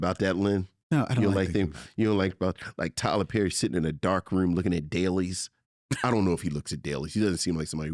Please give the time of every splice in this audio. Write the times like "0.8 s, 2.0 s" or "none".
none